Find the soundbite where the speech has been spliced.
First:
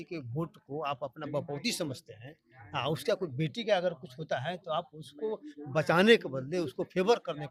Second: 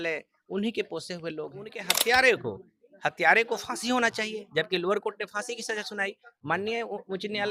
second; 1 cut; at 1.9 s

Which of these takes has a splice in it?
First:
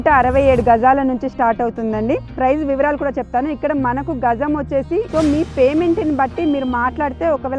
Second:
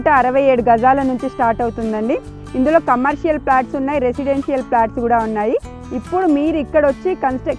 first; 2 cuts; at 2.3 s, 5.1 s

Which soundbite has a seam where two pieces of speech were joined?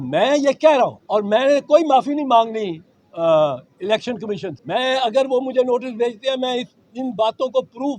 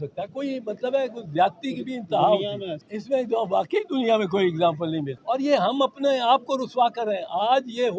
first; 2 cuts; at 1.0 s, 4.5 s

